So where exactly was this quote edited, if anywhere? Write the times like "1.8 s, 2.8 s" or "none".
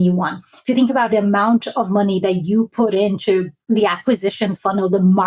1.1 s, 3.5 s